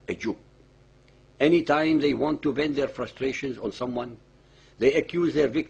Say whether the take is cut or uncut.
cut